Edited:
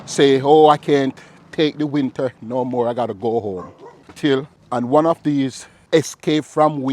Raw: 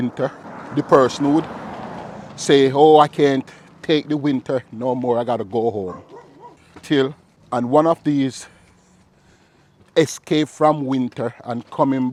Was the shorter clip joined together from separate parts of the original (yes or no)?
yes